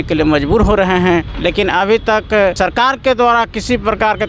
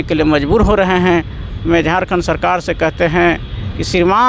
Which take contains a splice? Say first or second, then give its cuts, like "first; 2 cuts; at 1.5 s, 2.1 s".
first; 2 cuts; at 1.3 s, 2.5 s